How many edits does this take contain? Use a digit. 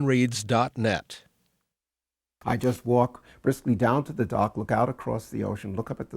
1